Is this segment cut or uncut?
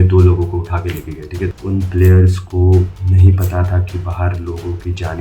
cut